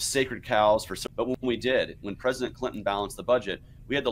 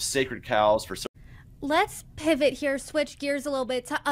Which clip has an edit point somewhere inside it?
second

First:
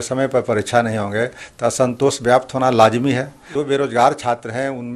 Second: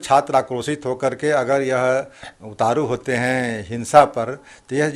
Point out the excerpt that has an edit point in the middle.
first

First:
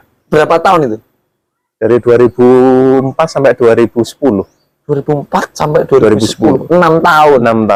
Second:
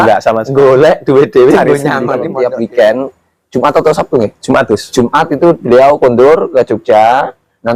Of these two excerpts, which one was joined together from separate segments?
second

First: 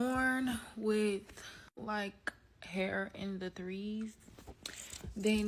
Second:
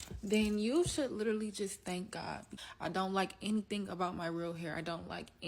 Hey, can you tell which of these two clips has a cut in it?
second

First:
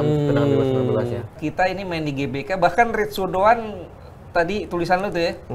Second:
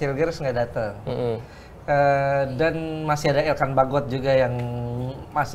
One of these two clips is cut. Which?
first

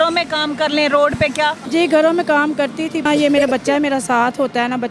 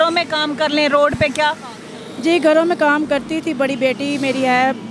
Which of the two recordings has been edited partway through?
first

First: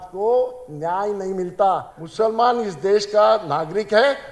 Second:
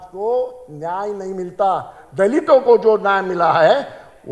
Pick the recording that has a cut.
first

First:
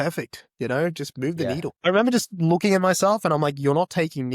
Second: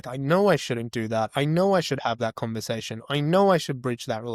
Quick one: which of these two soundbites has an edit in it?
first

